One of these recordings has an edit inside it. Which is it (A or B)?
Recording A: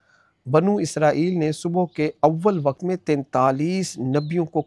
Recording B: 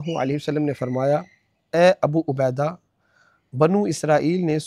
A